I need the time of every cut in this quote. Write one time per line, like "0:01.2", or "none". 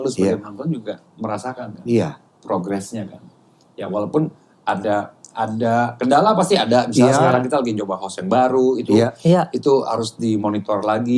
none